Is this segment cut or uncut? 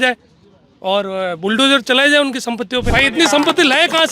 cut